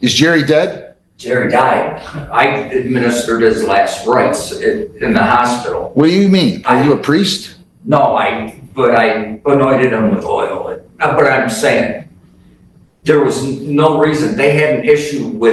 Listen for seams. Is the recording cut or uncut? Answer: uncut